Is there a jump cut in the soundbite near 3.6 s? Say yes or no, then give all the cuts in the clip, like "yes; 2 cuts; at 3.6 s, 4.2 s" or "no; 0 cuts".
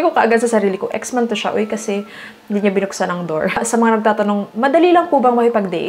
yes; 1 cut; at 3.6 s